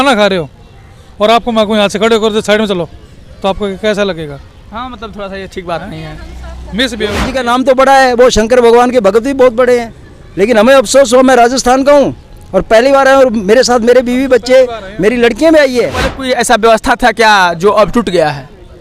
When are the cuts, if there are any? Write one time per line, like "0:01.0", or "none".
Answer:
0:07.3
0:16.1